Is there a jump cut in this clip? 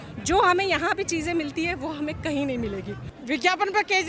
yes; 1 cut; at 3.0 s

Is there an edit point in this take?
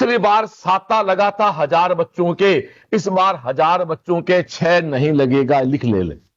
no; 0 cuts

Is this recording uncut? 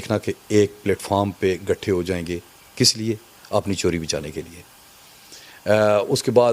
yes; 0 cuts

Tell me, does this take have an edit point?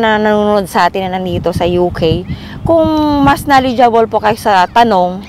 no; 0 cuts

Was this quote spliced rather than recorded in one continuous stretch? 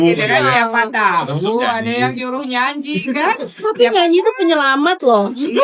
no; 0 cuts

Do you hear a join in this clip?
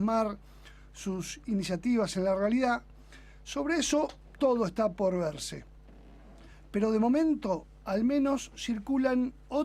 yes; 1 cut; at 7.3 s

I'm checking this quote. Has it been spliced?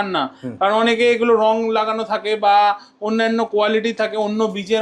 no; 0 cuts

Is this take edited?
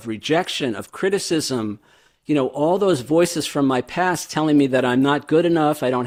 no; 0 cuts

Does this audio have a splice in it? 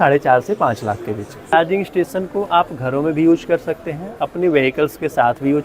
yes; 1 cut; at 1.5 s

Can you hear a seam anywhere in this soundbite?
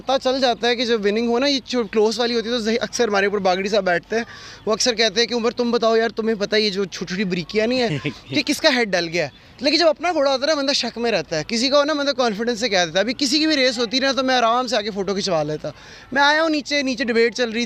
no; 0 cuts

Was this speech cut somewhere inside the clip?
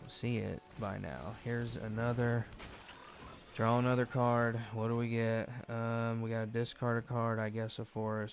no; 0 cuts

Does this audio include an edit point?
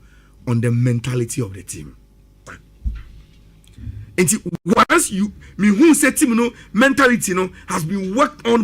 yes; 1 cut; at 2.4 s

